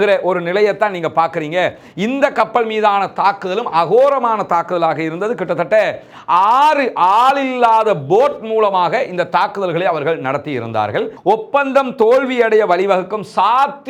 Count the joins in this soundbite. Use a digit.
1